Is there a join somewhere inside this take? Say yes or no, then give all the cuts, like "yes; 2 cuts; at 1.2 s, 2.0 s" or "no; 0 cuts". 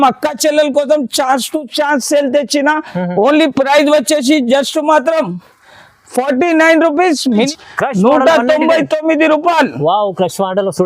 yes; 1 cut; at 7.5 s